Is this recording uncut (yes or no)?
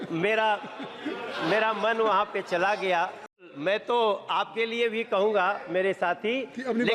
no